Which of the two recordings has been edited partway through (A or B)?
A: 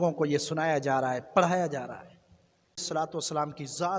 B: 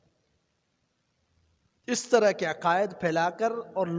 A